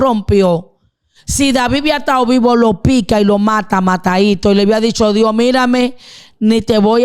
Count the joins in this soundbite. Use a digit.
0